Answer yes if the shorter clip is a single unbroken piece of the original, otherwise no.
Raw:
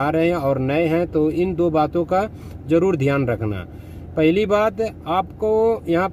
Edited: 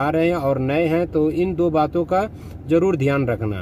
yes